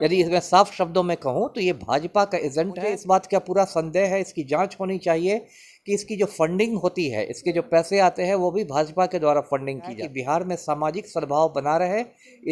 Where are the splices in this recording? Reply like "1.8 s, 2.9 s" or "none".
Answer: 3.0 s, 10.0 s

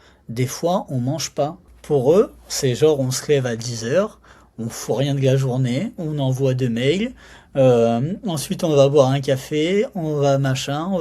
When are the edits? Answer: 1.7 s

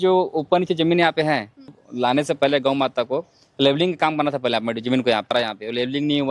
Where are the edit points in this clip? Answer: 1.8 s, 5.3 s

